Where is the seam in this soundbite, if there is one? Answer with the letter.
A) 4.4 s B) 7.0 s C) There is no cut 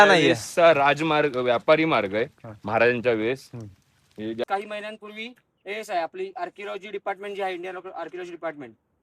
A